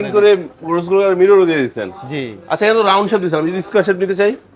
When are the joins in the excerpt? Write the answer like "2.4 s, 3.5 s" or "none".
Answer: none